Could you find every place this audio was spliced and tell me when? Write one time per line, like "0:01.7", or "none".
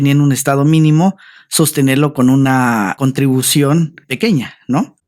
0:04.0

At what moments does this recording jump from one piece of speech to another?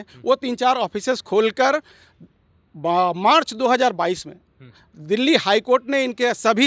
none

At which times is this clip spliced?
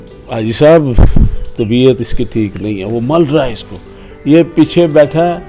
none

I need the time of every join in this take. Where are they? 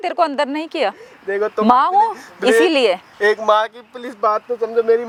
none

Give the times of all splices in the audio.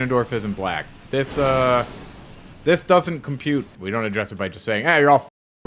0:03.8

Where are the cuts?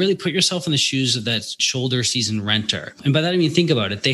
0:01.6
0:03.0

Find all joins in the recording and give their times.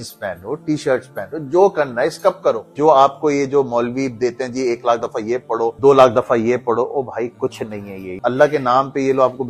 0:02.7
0:05.8
0:08.0

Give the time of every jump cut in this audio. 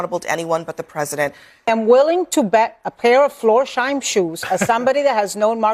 0:01.7

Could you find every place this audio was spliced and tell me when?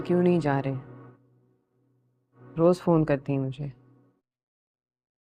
none

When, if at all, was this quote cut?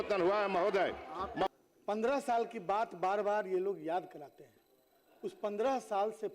0:01.5

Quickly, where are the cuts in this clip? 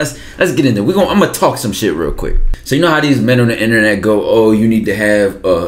0:02.5

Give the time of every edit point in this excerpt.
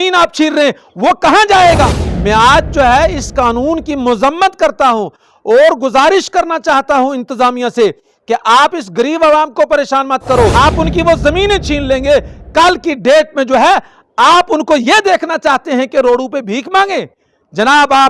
0:02.0
0:10.5

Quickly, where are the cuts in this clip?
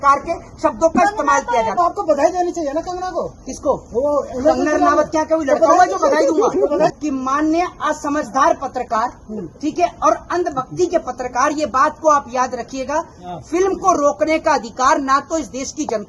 0:01.7
0:07.0

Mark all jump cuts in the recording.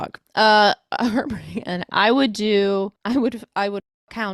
0:03.0

